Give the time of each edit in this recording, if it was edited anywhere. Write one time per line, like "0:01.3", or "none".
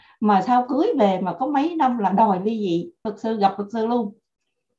0:03.1